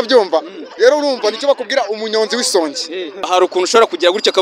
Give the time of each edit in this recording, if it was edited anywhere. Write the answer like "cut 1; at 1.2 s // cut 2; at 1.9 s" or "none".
cut 1; at 3.3 s